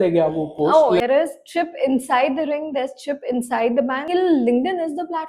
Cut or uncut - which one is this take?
cut